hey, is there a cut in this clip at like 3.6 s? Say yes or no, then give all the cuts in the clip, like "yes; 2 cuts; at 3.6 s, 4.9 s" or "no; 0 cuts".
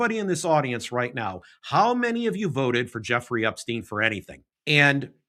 no; 0 cuts